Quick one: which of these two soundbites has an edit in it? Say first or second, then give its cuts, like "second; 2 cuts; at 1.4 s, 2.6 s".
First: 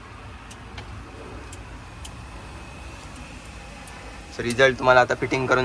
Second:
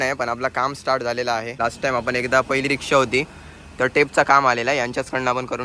second; 1 cut; at 1.5 s